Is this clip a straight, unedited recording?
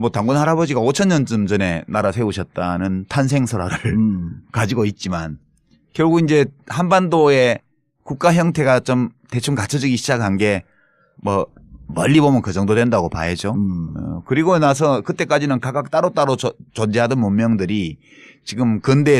yes; 0 cuts

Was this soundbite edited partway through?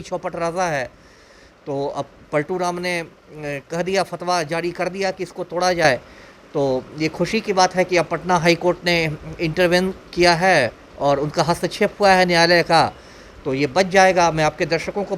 no; 0 cuts

